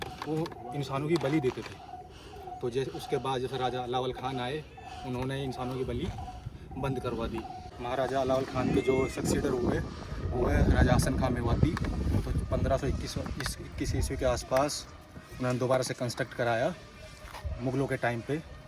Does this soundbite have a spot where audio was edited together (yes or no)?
no